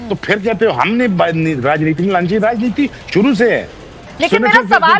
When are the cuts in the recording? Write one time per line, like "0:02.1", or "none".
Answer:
none